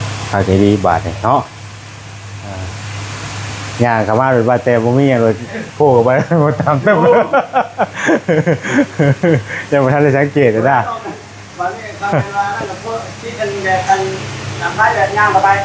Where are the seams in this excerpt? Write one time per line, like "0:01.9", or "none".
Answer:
none